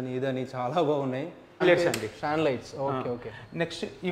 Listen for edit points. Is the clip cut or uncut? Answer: cut